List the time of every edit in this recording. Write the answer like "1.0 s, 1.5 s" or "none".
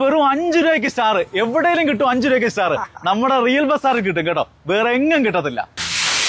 none